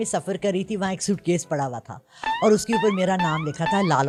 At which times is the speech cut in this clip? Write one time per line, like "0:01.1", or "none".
none